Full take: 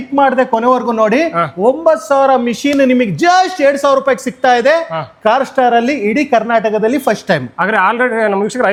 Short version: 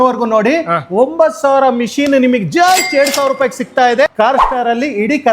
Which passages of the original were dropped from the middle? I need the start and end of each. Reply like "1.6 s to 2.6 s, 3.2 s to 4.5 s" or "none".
4.7 s to 5.1 s